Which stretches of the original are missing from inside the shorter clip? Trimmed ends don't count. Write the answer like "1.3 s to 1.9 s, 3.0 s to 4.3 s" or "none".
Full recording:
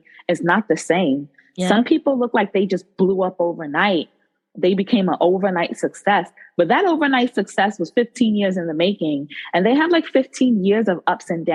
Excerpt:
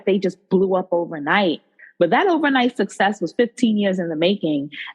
4.3 s to 6.4 s